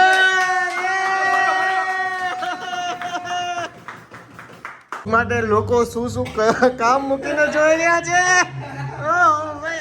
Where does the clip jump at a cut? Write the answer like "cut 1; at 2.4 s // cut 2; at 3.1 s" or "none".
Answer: cut 1; at 4.9 s